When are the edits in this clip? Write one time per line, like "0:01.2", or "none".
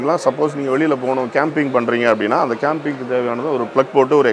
none